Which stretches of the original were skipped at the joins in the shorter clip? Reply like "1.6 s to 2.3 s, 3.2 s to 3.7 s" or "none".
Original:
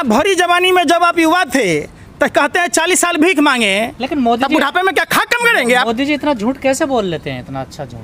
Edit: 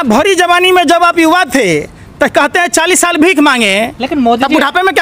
none